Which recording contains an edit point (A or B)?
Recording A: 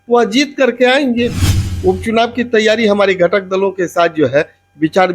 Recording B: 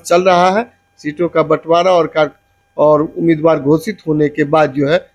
A